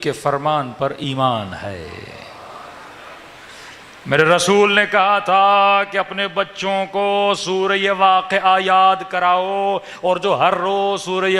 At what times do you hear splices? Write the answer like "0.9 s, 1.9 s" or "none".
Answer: none